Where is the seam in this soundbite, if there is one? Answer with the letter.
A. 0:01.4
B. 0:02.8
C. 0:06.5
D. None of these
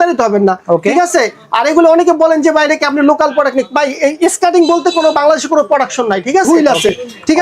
C